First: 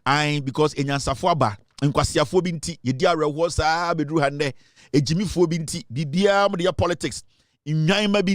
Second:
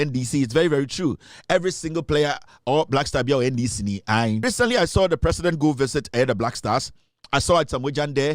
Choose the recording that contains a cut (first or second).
second